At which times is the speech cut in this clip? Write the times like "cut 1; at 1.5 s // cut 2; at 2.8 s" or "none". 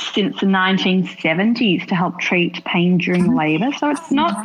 none